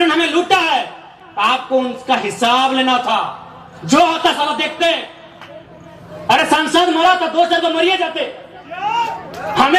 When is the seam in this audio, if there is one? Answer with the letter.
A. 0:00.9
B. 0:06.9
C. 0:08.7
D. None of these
D